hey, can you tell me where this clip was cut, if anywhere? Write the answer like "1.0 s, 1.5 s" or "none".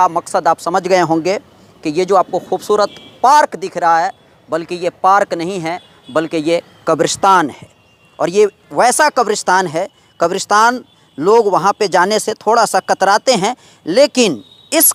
none

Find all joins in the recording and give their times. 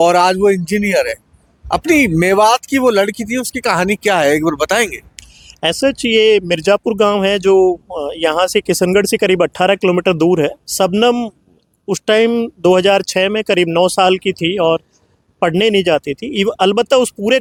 none

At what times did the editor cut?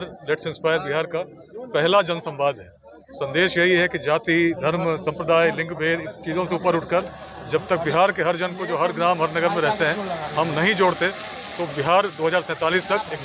none

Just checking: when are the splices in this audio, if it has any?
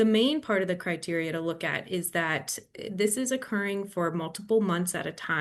none

